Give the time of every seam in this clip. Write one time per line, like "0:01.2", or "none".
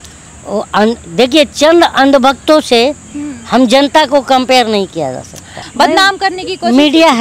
0:05.6